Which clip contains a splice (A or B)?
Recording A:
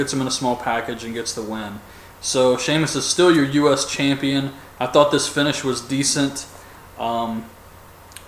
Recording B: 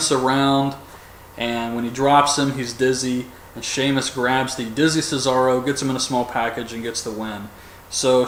A